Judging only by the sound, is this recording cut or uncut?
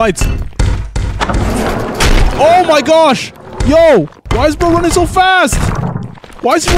cut